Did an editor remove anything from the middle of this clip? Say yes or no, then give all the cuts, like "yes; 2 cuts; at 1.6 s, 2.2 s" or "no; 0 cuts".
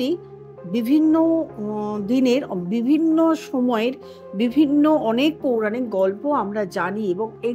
no; 0 cuts